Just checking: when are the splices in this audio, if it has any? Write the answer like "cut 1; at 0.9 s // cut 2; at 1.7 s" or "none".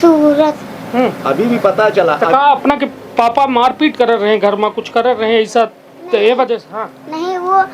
none